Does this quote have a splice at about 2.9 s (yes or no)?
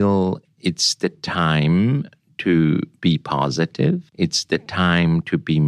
yes